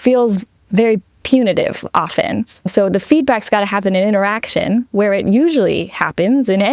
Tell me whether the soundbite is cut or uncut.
uncut